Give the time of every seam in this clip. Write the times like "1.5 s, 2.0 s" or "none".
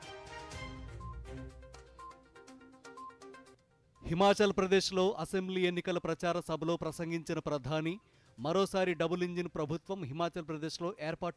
none